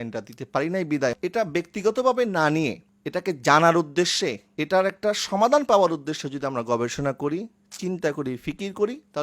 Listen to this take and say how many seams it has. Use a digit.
1